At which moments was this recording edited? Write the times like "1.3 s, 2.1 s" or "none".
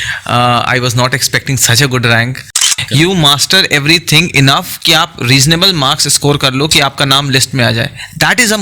2.7 s